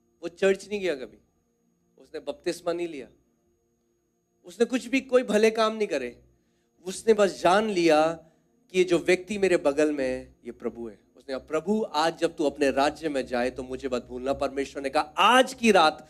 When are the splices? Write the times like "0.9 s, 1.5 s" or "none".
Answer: none